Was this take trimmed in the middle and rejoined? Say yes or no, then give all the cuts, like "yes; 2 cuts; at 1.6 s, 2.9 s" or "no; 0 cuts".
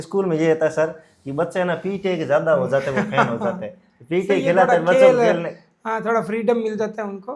no; 0 cuts